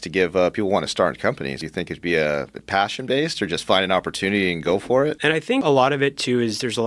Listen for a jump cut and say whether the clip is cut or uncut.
cut